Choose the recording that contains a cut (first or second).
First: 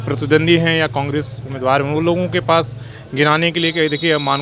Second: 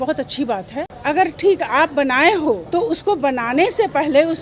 second